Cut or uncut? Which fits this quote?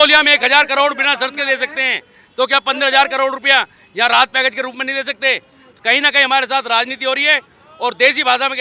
uncut